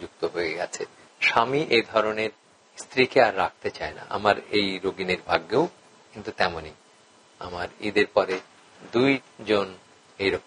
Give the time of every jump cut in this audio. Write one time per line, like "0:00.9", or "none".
0:01.1